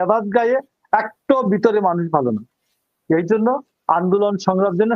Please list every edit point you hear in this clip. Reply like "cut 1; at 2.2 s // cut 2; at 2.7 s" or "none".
none